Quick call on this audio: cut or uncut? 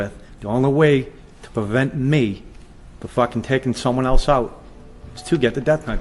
uncut